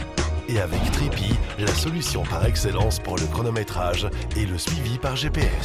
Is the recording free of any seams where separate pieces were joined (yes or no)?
yes